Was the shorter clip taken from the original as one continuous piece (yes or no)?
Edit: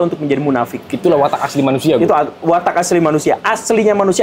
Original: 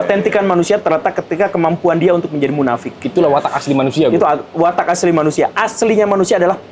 yes